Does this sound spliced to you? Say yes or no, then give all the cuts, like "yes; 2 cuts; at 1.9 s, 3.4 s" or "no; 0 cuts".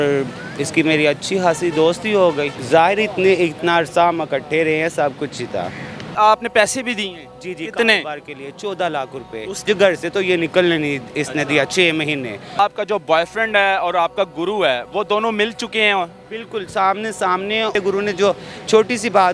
yes; 5 cuts; at 2.6 s, 6.1 s, 9.7 s, 12.6 s, 17.7 s